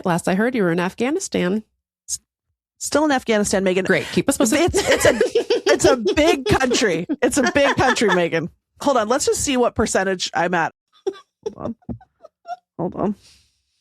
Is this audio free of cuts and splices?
no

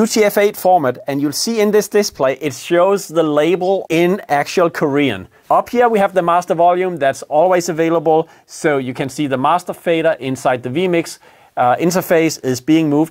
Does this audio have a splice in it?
yes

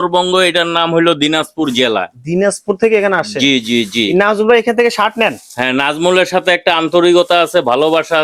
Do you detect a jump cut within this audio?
no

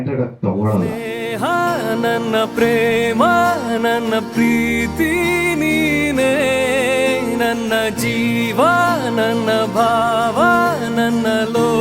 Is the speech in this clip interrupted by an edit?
yes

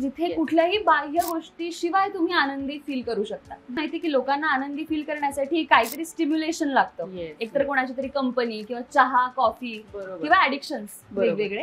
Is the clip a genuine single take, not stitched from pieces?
no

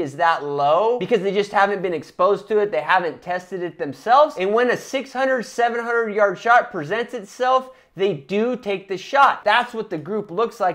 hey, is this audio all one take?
no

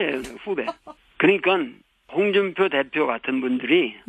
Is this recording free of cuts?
no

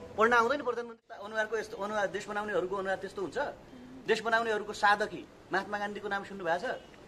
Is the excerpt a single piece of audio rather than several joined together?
no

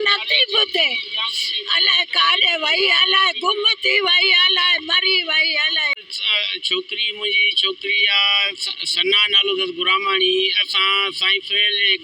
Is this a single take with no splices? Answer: no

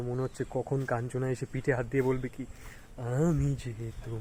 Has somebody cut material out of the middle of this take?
no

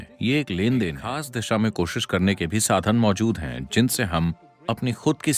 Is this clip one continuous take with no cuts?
no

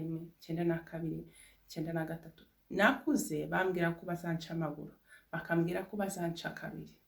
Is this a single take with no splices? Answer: yes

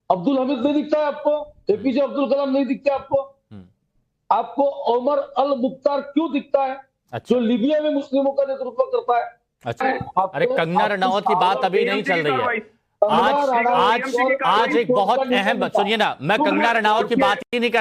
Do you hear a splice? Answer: yes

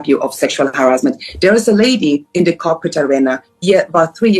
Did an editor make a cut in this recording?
no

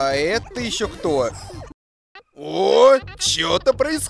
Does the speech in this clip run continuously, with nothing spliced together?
no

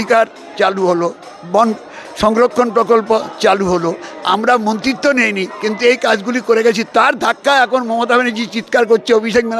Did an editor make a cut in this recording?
no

